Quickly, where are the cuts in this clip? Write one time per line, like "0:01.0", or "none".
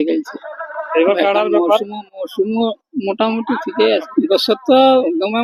0:04.1